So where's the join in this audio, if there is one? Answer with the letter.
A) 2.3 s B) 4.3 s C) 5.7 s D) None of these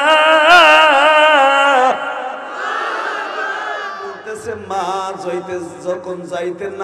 B